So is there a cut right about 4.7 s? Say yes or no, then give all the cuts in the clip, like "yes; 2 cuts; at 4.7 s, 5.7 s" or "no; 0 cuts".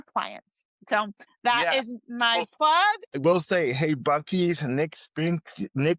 no; 2 cuts; at 1.0 s, 3.2 s